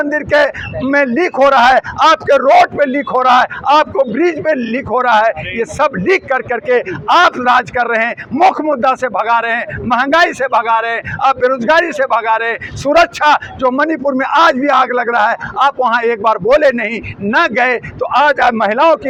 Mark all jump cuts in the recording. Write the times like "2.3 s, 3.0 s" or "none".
none